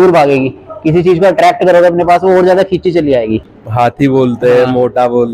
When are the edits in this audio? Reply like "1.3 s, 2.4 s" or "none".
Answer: 3.4 s